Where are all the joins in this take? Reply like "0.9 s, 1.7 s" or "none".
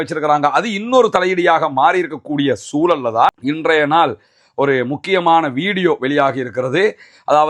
3.4 s